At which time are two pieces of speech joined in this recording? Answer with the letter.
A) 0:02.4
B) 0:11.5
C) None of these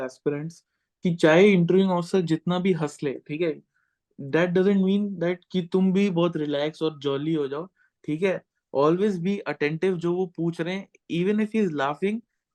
C